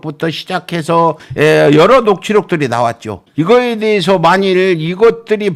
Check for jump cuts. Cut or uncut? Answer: uncut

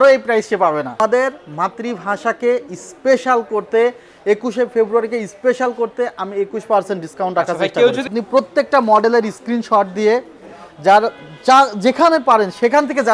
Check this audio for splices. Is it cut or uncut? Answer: cut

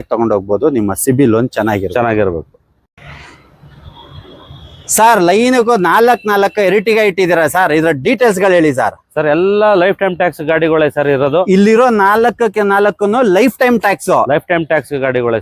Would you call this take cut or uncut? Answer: uncut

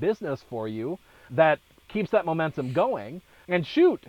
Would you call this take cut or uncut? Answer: cut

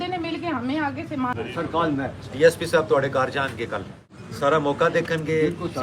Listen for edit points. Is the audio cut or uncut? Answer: cut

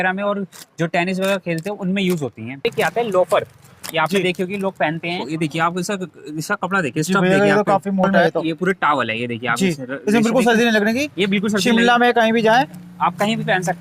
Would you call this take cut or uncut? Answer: cut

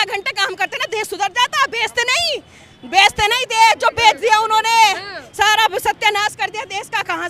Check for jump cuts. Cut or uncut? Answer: uncut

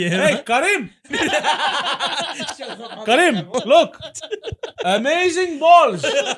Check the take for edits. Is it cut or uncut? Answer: uncut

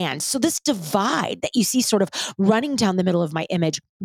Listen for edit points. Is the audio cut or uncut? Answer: uncut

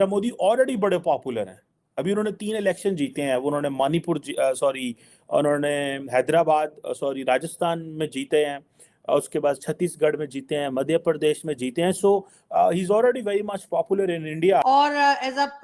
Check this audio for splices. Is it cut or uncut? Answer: cut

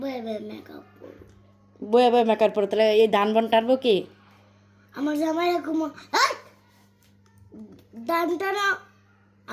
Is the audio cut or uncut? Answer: uncut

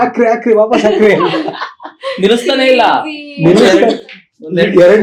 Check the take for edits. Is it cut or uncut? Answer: uncut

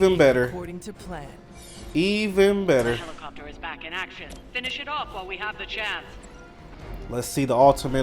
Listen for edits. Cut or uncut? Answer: cut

